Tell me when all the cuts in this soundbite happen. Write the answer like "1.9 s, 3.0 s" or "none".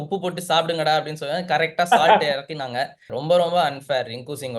3.1 s